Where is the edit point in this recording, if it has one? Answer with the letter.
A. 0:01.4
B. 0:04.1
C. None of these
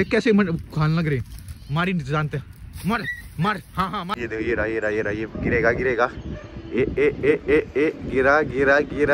B